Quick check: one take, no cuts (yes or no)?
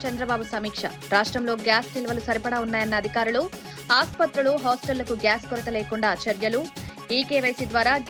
yes